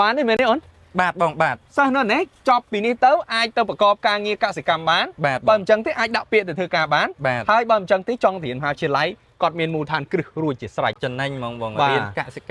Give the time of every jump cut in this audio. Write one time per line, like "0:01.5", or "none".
0:11.0